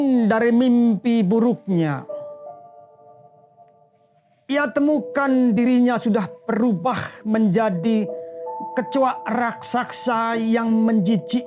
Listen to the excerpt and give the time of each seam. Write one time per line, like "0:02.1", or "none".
none